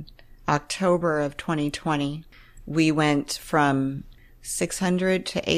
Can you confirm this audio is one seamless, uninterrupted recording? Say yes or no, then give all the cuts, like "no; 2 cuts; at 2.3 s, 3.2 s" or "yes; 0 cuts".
no; 2 cuts; at 2.2 s, 4.1 s